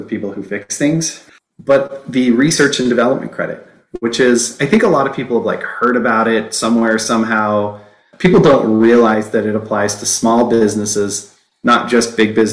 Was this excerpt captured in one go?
no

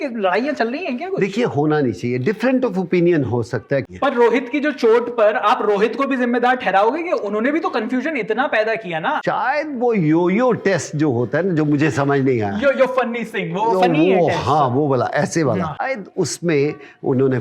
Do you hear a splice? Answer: yes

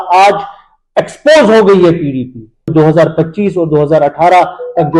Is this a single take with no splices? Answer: no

